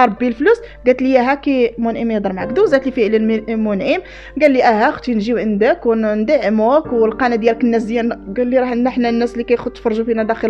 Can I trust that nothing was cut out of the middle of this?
yes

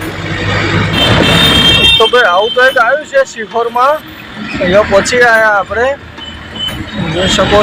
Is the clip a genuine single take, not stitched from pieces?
no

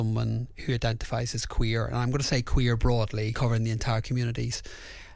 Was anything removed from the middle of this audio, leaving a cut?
yes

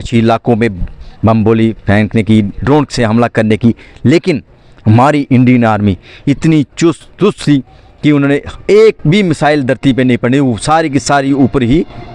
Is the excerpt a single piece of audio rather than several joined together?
yes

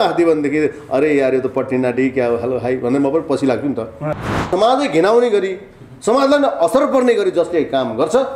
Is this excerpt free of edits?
no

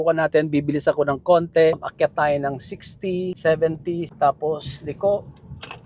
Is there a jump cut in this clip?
yes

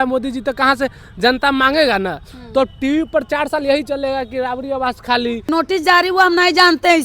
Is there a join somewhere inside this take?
yes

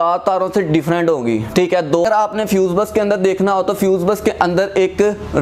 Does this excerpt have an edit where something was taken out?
yes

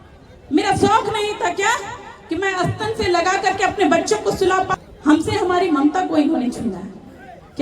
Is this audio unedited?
no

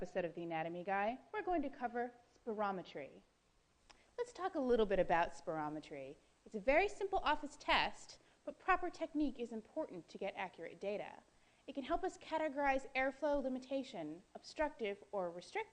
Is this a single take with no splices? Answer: no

